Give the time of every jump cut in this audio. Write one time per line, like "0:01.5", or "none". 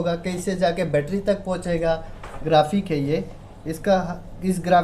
0:02.2